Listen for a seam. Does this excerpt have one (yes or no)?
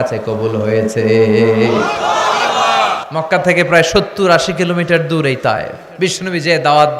yes